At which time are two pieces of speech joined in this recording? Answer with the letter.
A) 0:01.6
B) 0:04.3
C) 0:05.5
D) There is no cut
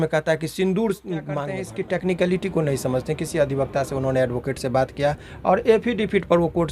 A